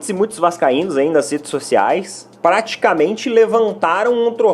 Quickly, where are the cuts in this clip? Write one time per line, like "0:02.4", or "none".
0:02.2